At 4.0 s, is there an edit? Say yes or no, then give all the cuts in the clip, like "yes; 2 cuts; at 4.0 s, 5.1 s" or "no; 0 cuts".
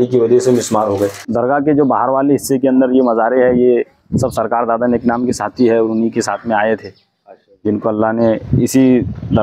no; 1 cut; at 1.2 s